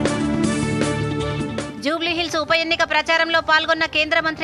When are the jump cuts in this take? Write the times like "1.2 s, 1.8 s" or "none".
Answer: none